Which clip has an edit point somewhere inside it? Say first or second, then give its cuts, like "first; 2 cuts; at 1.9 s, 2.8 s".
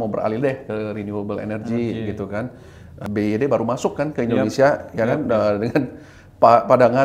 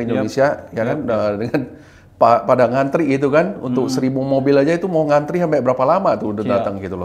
first; 1 cut; at 3.0 s